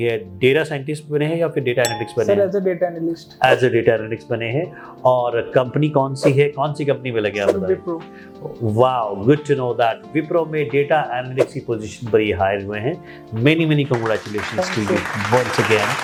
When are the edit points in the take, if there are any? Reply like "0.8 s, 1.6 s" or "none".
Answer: none